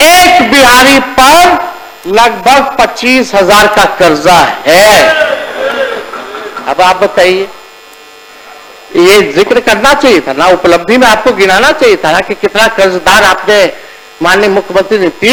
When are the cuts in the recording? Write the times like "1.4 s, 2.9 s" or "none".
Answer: none